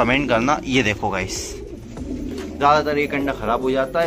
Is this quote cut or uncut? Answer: cut